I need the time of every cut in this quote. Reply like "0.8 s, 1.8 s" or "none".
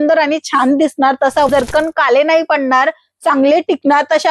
1.5 s